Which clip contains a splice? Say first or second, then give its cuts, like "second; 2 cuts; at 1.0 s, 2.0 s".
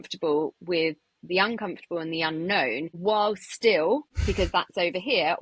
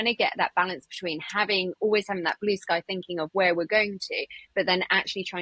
first; 2 cuts; at 2.9 s, 4.1 s